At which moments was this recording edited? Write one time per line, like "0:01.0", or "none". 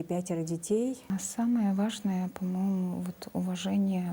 0:01.1